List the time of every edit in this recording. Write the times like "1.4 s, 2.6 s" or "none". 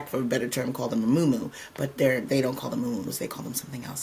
none